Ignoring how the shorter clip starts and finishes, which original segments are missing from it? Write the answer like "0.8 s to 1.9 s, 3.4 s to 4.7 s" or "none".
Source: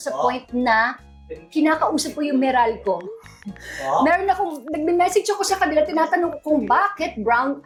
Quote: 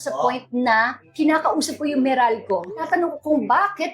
1.0 s to 1.4 s, 3.2 s to 6.1 s